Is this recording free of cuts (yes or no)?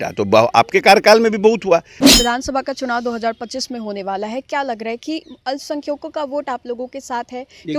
no